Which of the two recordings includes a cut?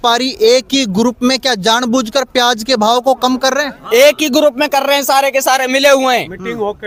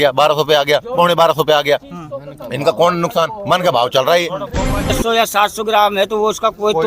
second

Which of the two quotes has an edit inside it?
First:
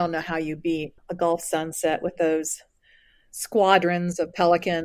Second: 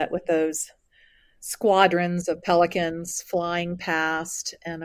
first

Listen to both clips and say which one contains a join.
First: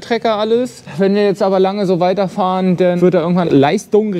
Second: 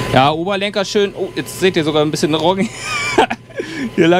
first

